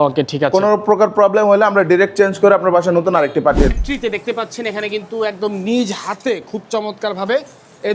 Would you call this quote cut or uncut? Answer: cut